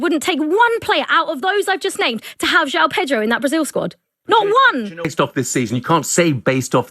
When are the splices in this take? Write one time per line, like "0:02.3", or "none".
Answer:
0:05.1

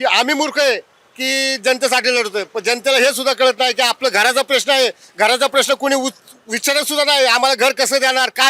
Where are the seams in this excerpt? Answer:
none

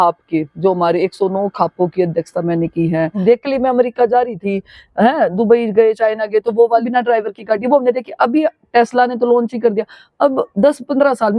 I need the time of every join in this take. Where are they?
0:03.1
0:06.9

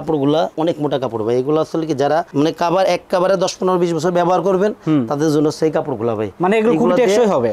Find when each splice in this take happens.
none

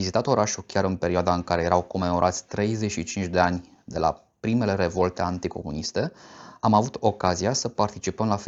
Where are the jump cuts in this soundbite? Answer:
none

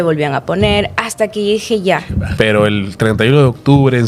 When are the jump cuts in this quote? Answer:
0:02.3

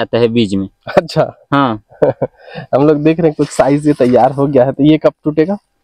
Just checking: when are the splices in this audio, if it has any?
none

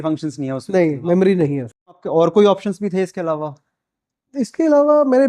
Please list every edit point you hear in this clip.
0:02.0
0:04.5

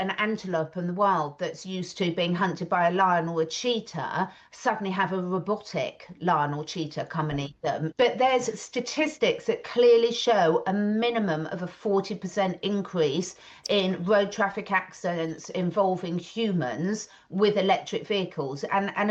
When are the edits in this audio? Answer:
0:07.9

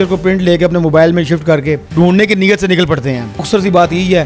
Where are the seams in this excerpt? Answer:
0:01.9
0:03.4

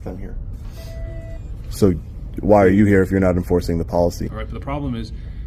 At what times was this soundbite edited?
0:04.3

